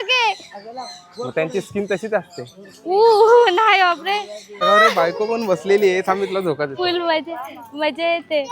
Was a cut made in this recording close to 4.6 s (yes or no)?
yes